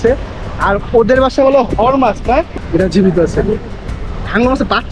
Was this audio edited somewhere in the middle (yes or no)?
yes